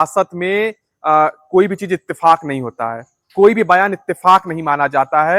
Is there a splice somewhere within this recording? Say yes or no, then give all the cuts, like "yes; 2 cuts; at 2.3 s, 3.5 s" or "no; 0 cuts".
no; 0 cuts